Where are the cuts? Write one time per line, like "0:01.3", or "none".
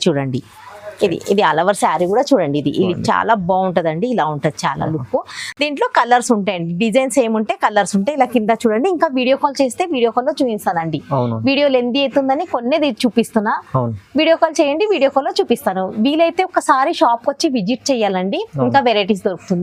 none